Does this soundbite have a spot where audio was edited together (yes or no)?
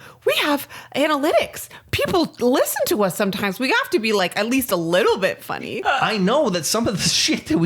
yes